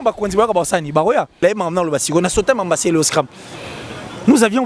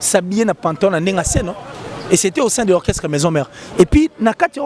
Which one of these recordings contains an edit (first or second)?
first